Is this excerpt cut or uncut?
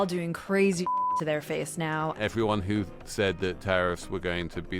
cut